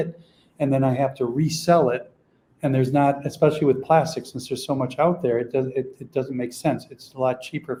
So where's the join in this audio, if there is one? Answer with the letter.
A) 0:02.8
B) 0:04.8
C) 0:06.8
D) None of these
D